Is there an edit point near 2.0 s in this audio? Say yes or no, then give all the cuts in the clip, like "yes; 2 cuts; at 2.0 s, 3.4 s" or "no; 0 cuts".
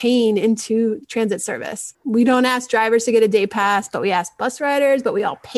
yes; 1 cut; at 2.0 s